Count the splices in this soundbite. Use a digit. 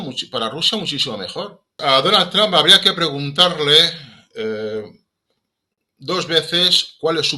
1